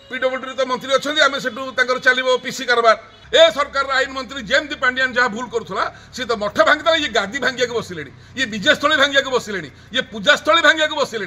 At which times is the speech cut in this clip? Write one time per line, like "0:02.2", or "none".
0:03.1